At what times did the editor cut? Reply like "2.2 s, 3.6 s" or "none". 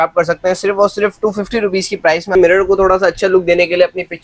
2.3 s